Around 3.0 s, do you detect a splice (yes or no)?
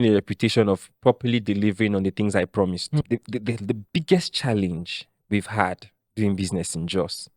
yes